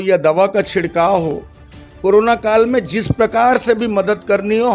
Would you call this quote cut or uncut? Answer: uncut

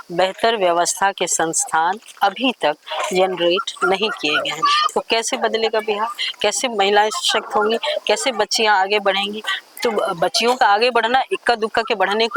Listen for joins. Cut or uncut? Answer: uncut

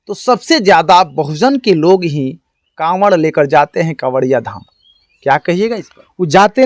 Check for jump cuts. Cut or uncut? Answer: uncut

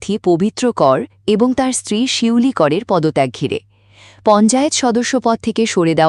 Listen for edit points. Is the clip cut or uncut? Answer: uncut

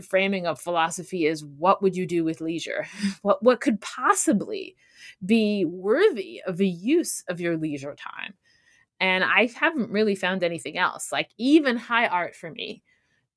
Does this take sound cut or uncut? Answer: uncut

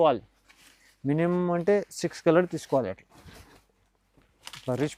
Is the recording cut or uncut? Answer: uncut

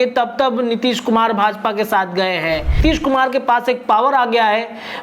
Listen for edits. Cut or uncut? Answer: cut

